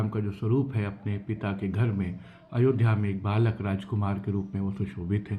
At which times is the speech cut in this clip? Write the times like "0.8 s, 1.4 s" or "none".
none